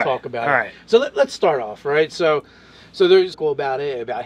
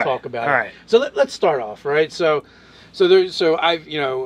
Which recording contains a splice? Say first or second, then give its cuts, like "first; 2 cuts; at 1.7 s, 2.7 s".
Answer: second; 1 cut; at 3.4 s